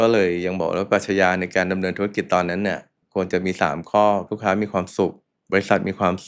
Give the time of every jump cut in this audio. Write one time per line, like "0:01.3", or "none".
0:02.9
0:04.3
0:05.3